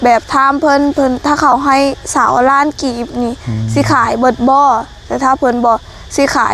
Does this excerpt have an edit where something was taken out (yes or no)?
no